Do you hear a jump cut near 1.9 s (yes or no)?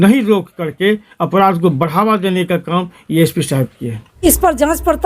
no